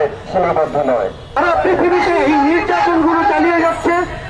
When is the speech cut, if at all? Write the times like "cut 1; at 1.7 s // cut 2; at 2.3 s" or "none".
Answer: cut 1; at 1.3 s